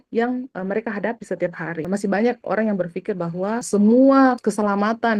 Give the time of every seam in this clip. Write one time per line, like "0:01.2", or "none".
0:01.8
0:03.6
0:04.4